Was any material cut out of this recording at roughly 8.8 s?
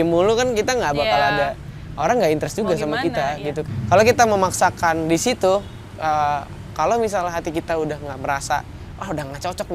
no; 1 cut; at 3.7 s

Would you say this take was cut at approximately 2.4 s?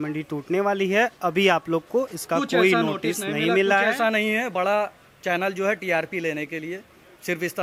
no; 0 cuts

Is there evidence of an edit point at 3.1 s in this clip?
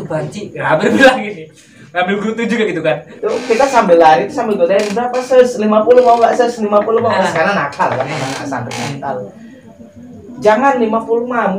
yes; 1 cut; at 3.1 s

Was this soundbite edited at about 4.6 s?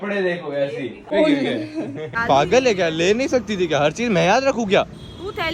no; 2 cuts; at 1.0 s, 2.1 s

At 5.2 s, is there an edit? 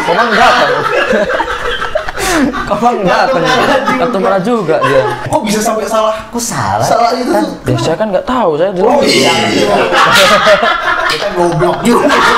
yes; 1 cut; at 5.2 s

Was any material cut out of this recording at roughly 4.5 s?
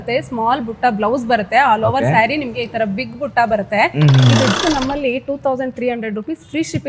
yes; 1 cut; at 4.5 s

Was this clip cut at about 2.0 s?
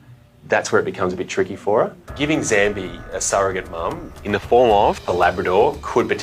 yes; 1 cut; at 2.0 s

